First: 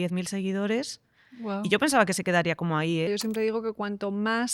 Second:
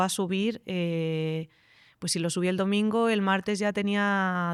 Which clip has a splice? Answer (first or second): first